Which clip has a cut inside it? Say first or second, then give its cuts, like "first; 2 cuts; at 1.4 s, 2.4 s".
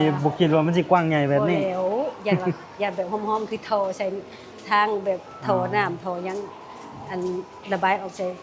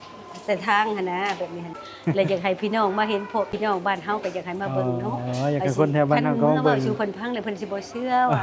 second; 2 cuts; at 1.8 s, 3.5 s